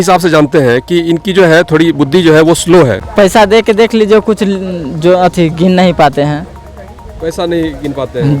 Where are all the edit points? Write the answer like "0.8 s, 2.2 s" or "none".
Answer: 3.0 s